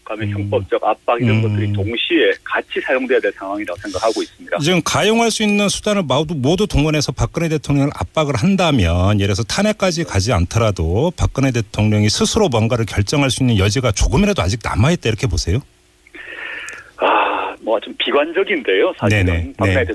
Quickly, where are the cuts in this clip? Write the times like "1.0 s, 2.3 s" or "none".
none